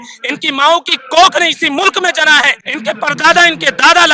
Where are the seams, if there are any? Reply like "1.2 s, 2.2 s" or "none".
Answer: 2.6 s